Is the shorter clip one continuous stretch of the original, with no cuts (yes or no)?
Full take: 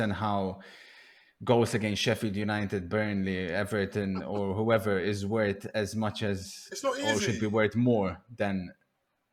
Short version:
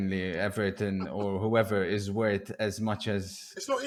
yes